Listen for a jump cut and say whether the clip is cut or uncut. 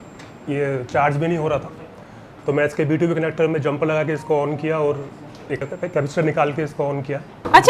uncut